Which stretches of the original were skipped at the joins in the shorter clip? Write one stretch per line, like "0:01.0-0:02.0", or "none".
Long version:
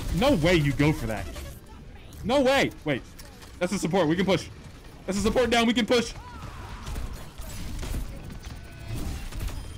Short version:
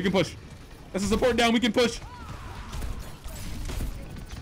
none